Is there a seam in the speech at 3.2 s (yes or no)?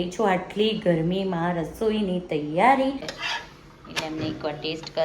yes